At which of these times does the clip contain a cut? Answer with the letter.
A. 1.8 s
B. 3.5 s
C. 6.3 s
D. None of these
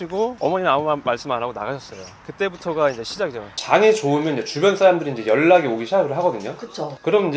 B